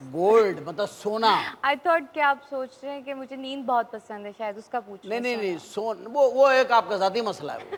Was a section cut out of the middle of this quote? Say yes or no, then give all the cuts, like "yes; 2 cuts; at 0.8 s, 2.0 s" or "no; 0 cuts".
no; 0 cuts